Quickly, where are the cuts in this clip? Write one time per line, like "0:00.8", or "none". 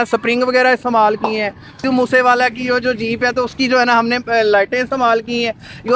0:01.7

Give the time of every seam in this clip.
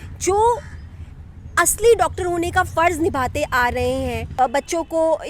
0:04.2

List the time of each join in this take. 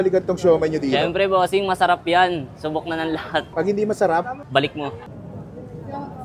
0:04.7

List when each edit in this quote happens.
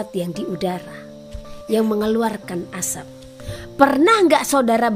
0:01.5
0:03.5

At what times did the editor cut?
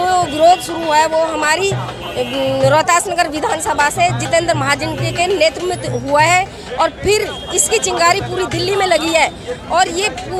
none

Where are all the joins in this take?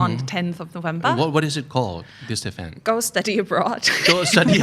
none

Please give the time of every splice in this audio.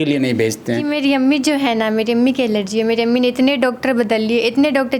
0:00.9

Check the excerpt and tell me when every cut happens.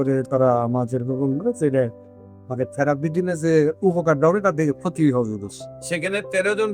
none

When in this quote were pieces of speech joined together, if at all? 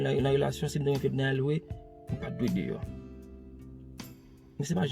0:02.8
0:04.2

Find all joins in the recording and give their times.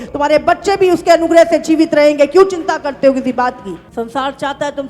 0:03.8

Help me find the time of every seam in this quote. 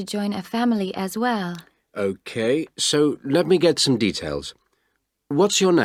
none

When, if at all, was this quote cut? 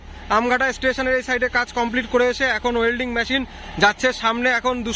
none

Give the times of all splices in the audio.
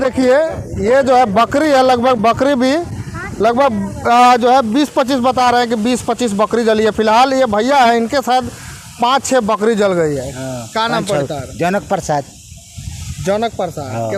none

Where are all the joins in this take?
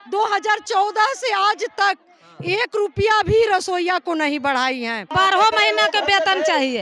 0:05.1

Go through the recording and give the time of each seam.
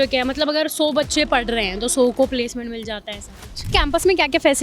0:03.7

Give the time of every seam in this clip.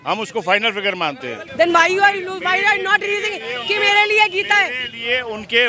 0:01.4

